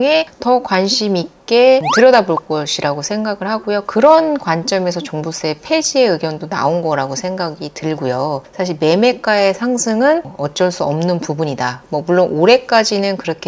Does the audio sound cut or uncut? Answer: uncut